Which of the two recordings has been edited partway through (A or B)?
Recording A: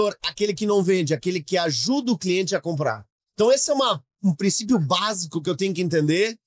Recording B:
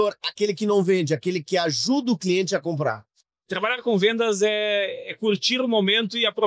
B